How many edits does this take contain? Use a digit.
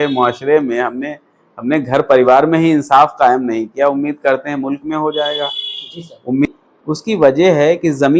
1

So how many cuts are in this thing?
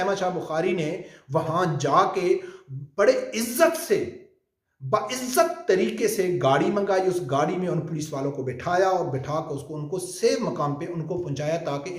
0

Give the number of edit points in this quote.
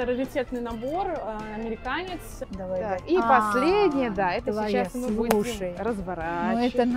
1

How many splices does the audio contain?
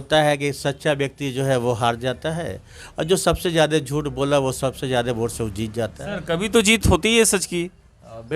0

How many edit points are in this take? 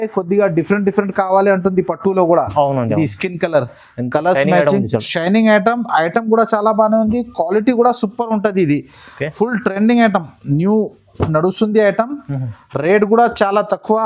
0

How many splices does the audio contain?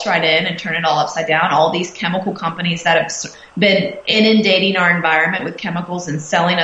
1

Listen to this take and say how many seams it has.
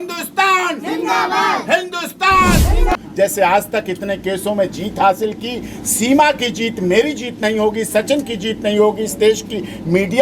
1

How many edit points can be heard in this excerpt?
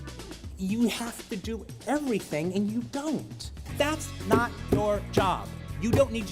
1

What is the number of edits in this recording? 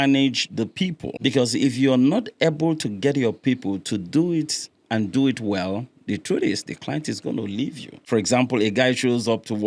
2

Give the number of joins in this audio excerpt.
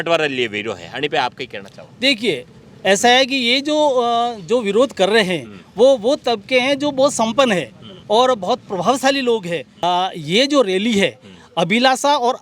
1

